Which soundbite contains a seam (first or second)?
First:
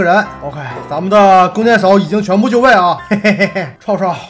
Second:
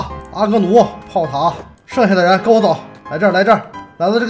first